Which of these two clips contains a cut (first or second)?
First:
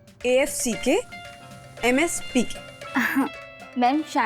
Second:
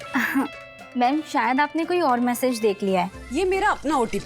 second